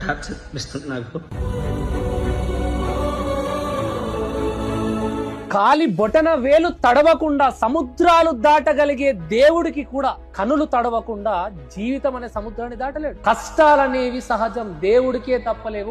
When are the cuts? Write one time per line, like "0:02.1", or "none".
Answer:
none